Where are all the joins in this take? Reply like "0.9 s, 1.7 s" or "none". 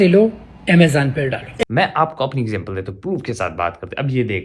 1.5 s